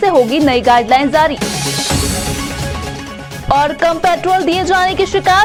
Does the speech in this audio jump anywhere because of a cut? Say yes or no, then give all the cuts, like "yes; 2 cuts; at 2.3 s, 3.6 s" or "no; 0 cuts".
no; 0 cuts